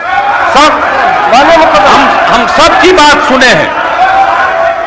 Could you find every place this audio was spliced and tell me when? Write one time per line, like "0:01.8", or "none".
none